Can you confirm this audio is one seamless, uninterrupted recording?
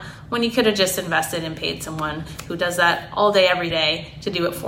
yes; 0 cuts

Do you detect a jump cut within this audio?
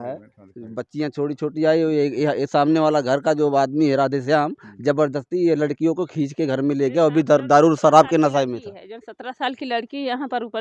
no; 0 cuts

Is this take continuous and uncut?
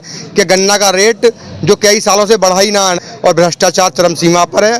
no; 1 cut; at 3.0 s

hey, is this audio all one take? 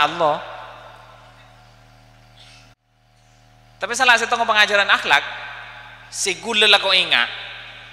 no; 1 cut; at 2.8 s

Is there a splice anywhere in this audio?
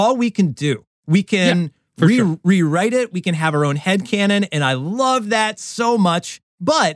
no; 0 cuts

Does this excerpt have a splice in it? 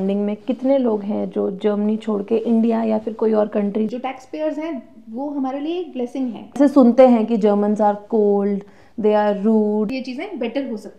yes; 3 cuts; at 3.9 s, 6.6 s, 9.9 s

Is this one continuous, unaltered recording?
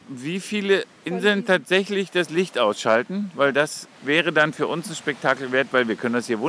no; 2 cuts; at 1.0 s, 4.0 s

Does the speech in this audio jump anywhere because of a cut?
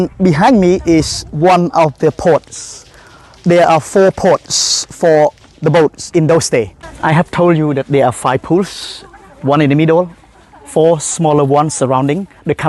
yes; 1 cut; at 6.8 s

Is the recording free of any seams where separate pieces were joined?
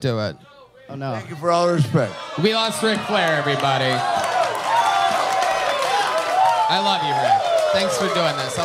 yes; 0 cuts

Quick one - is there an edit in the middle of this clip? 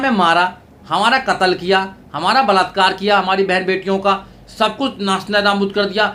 no; 0 cuts

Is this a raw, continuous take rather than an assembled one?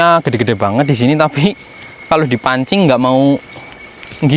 yes; 0 cuts

